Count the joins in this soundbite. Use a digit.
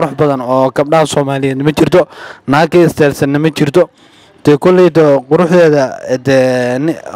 0